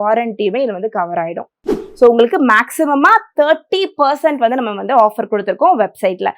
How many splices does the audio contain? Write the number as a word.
one